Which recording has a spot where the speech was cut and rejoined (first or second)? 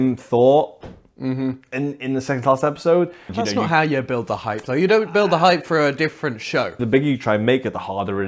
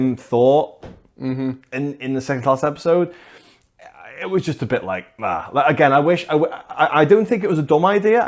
first